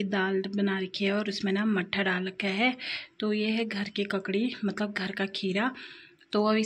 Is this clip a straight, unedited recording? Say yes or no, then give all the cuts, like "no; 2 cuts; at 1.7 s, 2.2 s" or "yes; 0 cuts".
yes; 0 cuts